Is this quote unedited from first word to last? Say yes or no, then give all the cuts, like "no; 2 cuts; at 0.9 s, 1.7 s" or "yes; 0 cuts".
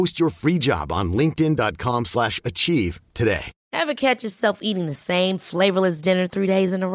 no; 1 cut; at 3.6 s